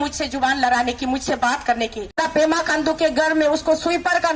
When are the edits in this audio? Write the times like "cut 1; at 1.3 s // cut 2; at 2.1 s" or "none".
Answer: cut 1; at 2.1 s

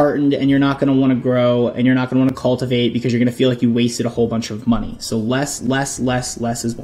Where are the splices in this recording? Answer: none

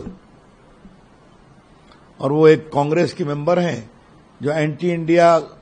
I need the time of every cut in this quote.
none

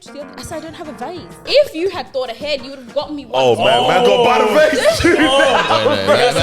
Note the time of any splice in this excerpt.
cut 1; at 1.5 s

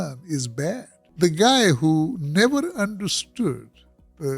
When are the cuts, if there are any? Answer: cut 1; at 1.0 s

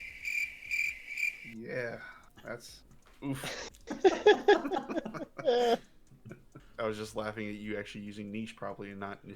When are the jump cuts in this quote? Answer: cut 1; at 6.6 s

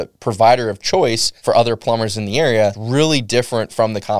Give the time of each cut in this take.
cut 1; at 1.3 s // cut 2; at 2.8 s

